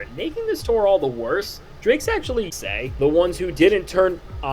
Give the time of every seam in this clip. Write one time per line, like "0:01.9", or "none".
0:02.5